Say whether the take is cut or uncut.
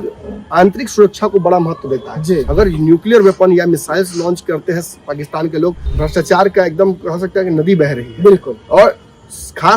cut